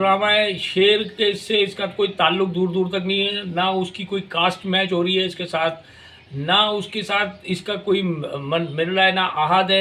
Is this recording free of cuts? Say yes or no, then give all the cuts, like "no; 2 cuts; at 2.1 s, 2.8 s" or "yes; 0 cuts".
yes; 0 cuts